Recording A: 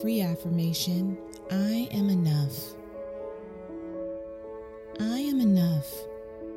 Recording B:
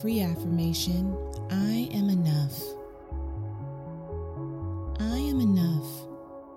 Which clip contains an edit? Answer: A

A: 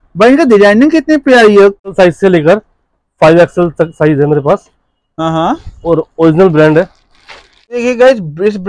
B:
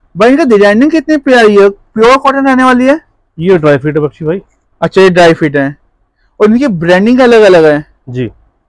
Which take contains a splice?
A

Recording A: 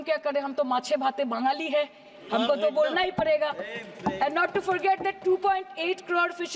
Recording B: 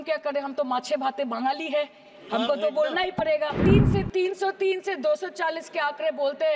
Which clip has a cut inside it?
B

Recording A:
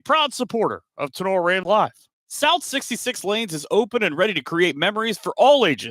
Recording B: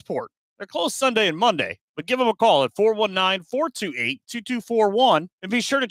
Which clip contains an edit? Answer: A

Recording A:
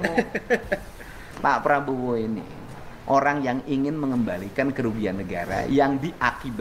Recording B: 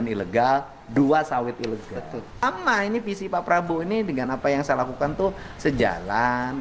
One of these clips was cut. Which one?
B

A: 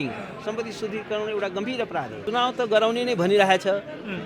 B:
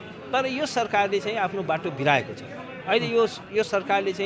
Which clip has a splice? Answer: A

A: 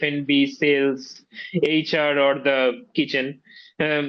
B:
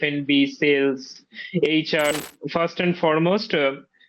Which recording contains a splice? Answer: B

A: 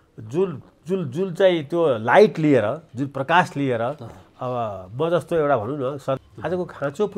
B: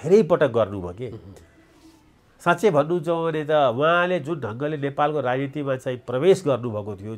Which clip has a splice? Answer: A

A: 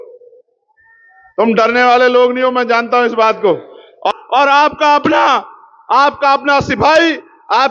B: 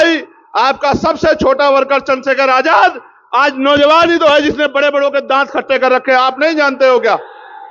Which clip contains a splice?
A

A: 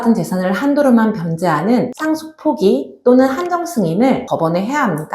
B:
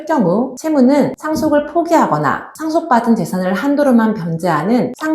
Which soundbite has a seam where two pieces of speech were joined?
A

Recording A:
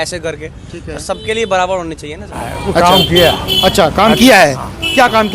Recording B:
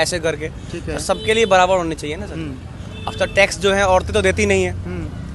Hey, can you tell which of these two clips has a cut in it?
A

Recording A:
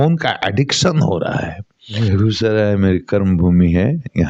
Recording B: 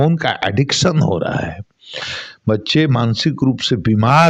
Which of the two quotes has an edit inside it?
A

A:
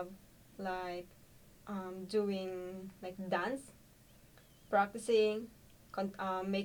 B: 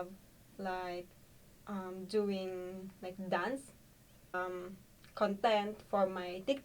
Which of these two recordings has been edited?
B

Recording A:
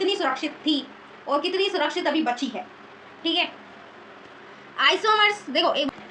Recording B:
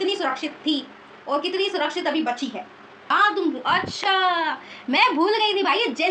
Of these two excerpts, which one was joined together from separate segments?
B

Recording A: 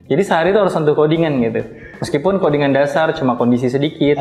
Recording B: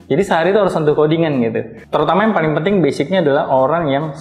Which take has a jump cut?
B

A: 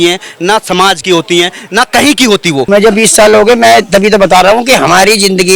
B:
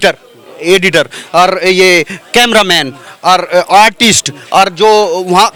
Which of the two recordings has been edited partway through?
A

